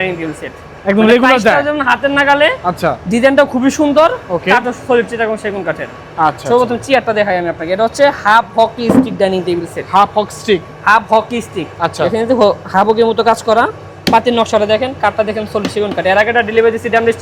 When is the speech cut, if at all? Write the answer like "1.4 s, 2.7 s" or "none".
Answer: none